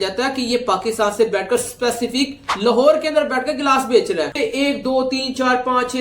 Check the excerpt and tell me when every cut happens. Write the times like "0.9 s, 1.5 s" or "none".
4.3 s

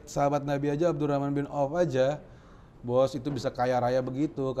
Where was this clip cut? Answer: none

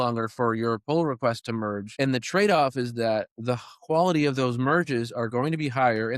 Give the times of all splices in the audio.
1.8 s

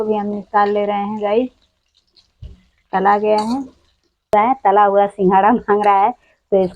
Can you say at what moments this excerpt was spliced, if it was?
4.3 s

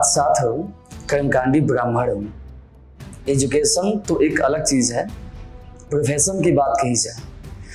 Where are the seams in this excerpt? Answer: none

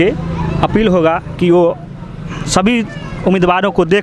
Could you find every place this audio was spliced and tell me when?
none

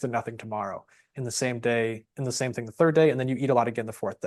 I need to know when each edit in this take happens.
none

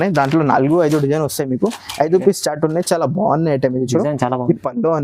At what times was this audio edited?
none

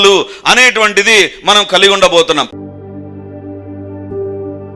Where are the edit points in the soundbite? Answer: 2.5 s

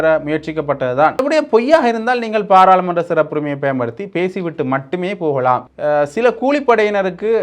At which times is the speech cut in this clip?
1.2 s, 5.7 s

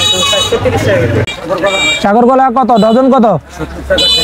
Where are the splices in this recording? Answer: 1.3 s

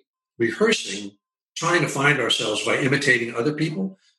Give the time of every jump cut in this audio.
none

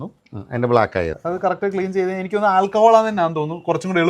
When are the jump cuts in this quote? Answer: 1.2 s

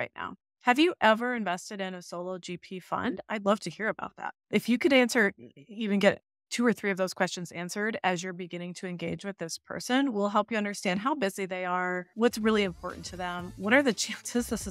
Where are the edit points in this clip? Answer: none

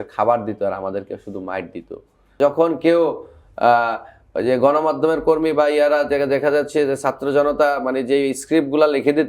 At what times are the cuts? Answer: 2.3 s

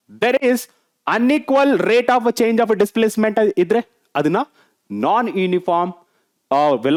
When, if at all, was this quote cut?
none

